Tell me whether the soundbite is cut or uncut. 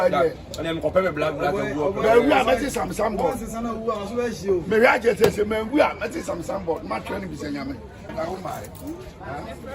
cut